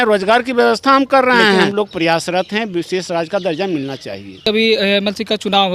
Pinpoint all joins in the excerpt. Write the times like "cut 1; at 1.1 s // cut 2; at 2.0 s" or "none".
cut 1; at 1.7 s // cut 2; at 4.5 s